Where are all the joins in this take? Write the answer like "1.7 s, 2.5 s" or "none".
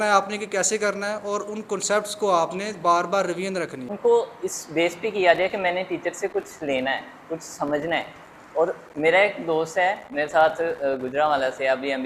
3.9 s

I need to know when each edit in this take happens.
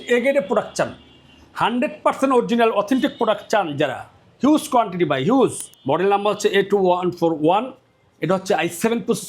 5.7 s

